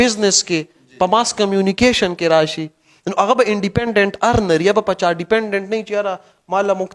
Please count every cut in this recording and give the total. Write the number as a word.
zero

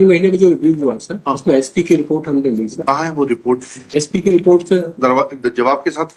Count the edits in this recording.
zero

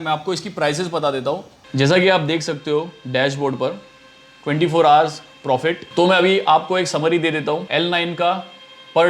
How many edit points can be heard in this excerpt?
two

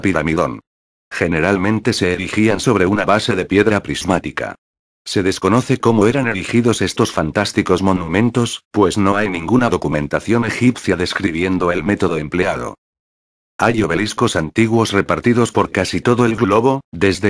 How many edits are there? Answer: one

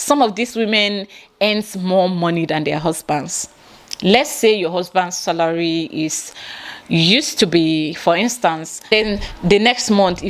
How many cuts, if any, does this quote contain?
one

